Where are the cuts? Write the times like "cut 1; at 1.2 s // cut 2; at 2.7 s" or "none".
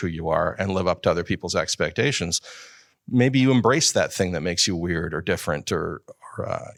none